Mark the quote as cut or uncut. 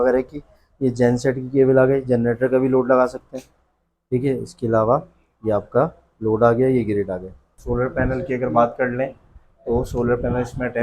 cut